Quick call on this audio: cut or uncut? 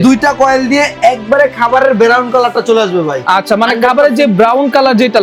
uncut